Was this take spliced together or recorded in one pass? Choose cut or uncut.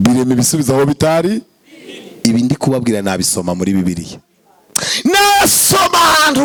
uncut